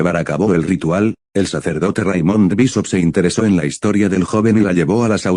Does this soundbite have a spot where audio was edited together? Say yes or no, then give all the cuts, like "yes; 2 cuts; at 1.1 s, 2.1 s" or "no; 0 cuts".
yes; 1 cut; at 1.5 s